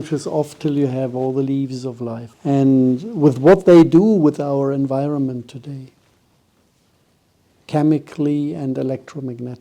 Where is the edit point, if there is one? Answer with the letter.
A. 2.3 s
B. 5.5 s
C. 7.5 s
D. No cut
A